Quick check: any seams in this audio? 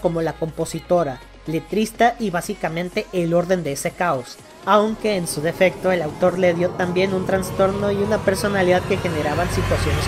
no; 0 cuts

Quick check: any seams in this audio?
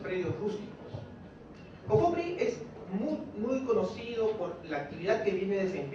no; 0 cuts

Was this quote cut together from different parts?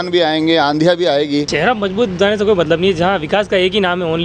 yes; 1 cut; at 1.5 s

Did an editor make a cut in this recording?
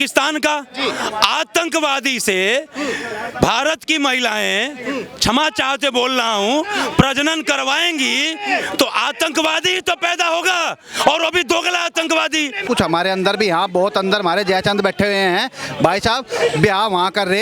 yes; 1 cut; at 12.6 s

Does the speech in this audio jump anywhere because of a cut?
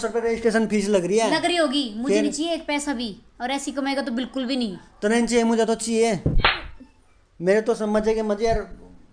no; 0 cuts

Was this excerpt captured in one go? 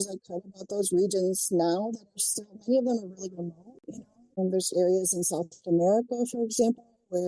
yes; 0 cuts

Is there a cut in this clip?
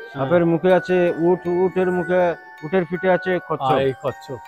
no; 0 cuts

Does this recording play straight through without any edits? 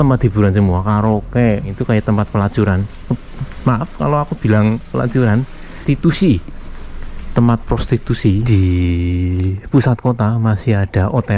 no; 3 cuts; at 1.8 s, 5.8 s, 8.4 s

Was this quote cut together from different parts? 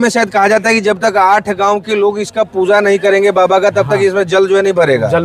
no; 0 cuts

